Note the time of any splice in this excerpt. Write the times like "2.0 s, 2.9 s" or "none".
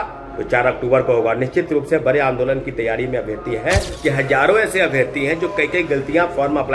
3.9 s